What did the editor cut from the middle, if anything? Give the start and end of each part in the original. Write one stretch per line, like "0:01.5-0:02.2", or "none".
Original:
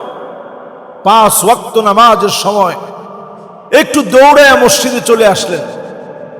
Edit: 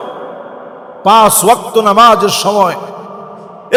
none